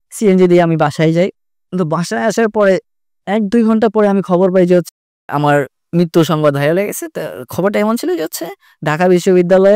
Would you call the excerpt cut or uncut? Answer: uncut